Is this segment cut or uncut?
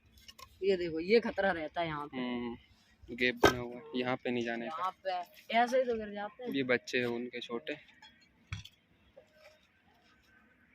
uncut